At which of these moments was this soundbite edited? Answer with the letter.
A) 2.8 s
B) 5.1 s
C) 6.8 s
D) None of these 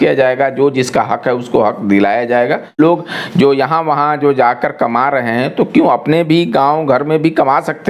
A